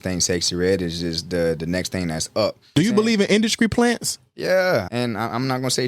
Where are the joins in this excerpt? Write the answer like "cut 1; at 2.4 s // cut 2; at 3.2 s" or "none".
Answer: cut 1; at 2.7 s // cut 2; at 4.9 s

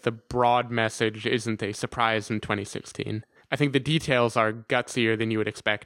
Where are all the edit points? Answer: cut 1; at 3.6 s

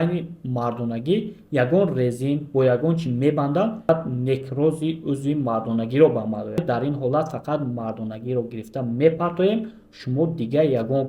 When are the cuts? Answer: cut 1; at 3.9 s // cut 2; at 6.6 s

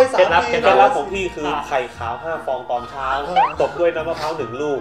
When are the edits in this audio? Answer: none

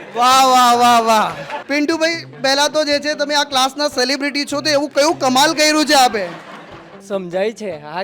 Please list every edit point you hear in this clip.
cut 1; at 1.5 s // cut 2; at 7.0 s

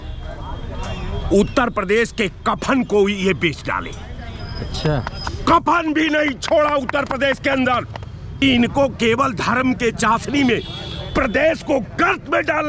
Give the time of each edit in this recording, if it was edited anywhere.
cut 1; at 8.3 s

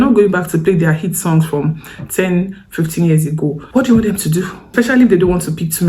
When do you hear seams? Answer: cut 1; at 3.6 s // cut 2; at 4.6 s

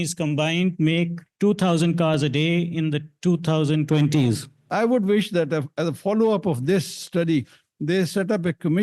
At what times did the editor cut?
cut 1; at 1.2 s // cut 2; at 4.7 s

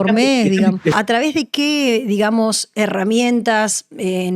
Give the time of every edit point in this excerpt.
cut 1; at 0.9 s

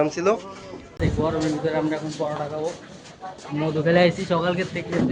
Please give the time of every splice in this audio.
cut 1; at 1.0 s

